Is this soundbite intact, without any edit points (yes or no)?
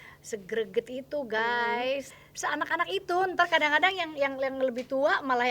no